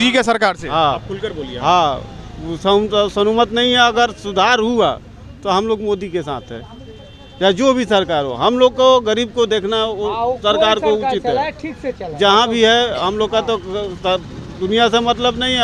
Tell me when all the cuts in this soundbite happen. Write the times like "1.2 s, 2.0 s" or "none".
none